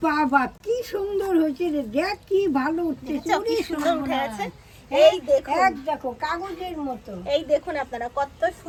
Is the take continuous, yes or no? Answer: yes